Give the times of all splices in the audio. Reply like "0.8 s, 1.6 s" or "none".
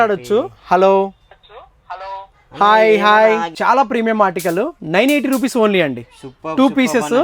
3.5 s